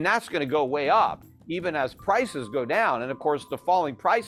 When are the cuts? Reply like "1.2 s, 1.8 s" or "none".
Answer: none